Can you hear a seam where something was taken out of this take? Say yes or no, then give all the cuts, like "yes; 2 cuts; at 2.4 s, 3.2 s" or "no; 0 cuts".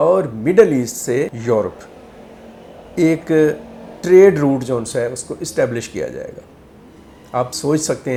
no; 0 cuts